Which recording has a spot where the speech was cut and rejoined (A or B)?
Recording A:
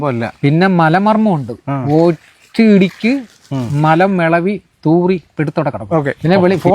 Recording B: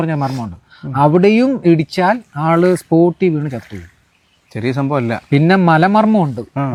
A